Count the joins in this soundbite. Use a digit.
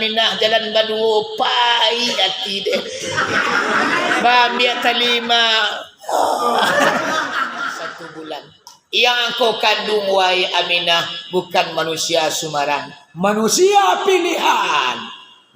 1